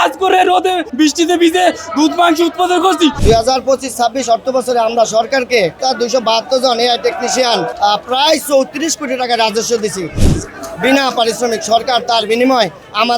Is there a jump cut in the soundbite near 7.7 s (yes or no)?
yes